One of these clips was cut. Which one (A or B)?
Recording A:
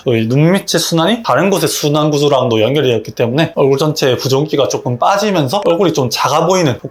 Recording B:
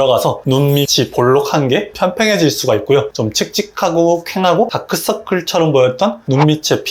B